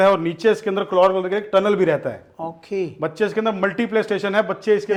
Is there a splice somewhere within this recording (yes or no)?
no